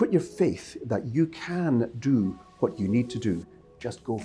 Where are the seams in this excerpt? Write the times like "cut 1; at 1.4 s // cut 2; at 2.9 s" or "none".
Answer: none